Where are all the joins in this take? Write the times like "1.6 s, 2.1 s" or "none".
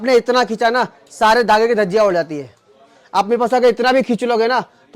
none